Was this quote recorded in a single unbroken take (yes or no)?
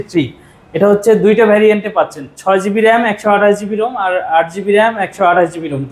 yes